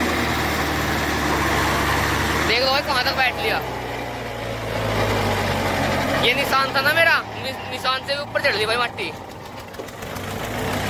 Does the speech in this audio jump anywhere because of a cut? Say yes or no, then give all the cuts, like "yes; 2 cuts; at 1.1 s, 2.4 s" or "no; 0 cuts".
no; 0 cuts